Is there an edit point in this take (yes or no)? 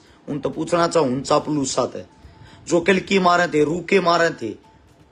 no